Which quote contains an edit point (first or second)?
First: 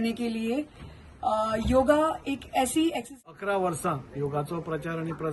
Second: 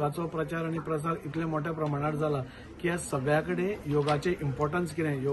first